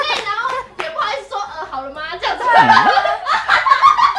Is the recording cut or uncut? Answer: uncut